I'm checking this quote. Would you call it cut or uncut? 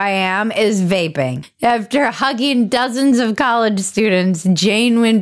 cut